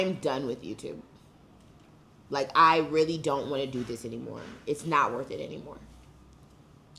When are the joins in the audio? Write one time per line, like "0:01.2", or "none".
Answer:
none